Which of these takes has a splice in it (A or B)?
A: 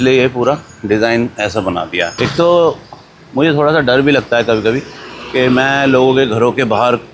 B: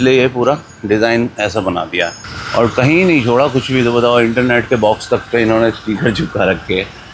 A